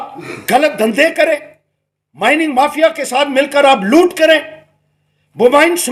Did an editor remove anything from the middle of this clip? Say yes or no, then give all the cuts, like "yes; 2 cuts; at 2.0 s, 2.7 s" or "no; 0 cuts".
no; 0 cuts